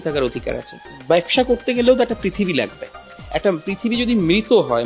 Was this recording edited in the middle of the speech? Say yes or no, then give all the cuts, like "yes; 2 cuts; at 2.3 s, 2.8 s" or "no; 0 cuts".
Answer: yes; 1 cut; at 0.9 s